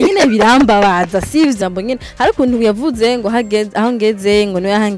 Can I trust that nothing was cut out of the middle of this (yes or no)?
no